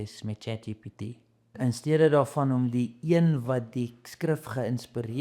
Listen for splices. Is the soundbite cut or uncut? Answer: cut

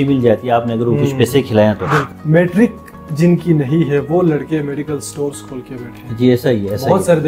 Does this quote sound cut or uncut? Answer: cut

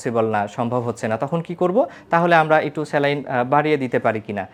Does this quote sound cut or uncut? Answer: uncut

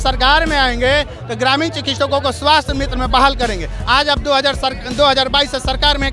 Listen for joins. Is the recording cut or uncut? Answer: uncut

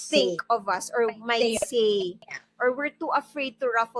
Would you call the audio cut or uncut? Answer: uncut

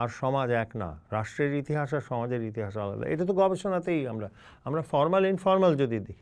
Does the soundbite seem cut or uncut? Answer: uncut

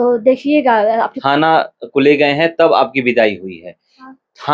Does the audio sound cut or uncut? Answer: cut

